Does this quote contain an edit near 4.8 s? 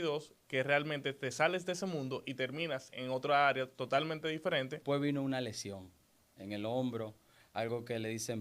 yes; 1 cut; at 4.8 s

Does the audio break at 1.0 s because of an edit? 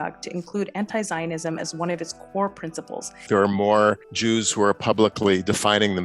no; 2 cuts; at 3.3 s, 4.1 s

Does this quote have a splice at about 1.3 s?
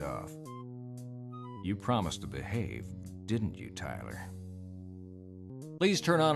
no; 2 cuts; at 4.1 s, 5.5 s

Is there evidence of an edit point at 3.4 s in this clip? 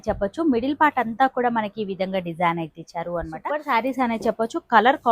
yes; 1 cut; at 3.4 s

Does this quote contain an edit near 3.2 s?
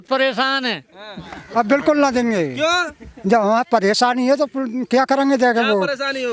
no; 1 cut; at 1.3 s

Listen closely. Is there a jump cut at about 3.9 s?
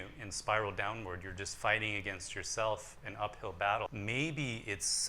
yes; 1 cut; at 3.9 s

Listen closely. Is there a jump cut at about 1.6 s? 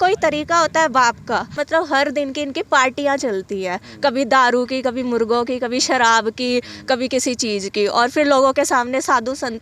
yes; 1 cut; at 1.6 s

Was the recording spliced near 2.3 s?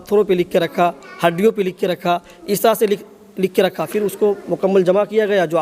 no; 0 cuts

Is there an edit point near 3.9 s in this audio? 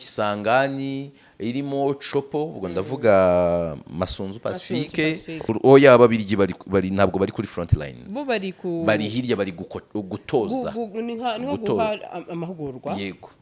no; 1 cut; at 5.4 s

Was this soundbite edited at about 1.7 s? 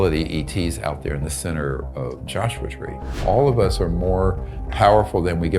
no; 1 cut; at 3.1 s

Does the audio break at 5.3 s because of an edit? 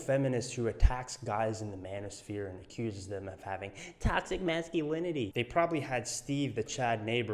yes; 1 cut; at 5.3 s

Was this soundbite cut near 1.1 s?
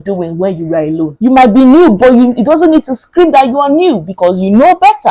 yes; 1 cut; at 1.1 s

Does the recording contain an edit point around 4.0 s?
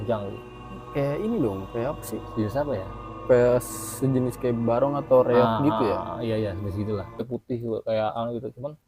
no; 1 cut; at 7.2 s

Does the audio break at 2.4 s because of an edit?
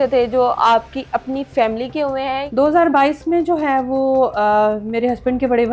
yes; 1 cut; at 2.4 s

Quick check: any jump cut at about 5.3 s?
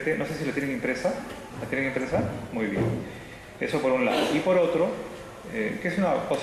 no; 1 cut; at 3.3 s

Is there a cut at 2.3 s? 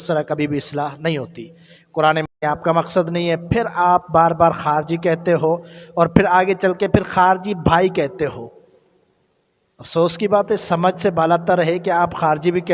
yes; 1 cut; at 2.3 s

